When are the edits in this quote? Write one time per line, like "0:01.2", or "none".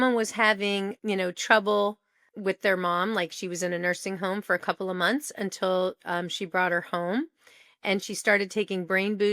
0:00.9